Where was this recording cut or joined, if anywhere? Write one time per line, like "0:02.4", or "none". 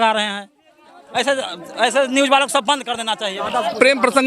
0:03.4